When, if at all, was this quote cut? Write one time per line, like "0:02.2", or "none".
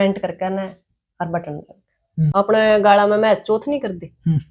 0:02.3